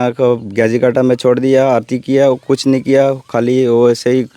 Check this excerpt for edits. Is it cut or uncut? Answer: uncut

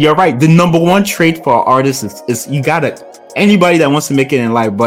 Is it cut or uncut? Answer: uncut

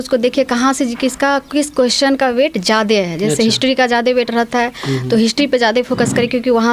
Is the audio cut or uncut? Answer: uncut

